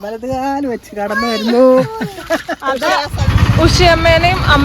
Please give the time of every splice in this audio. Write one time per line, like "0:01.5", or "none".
0:03.2